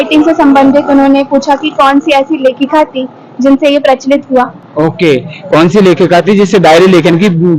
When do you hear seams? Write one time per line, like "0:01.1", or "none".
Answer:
none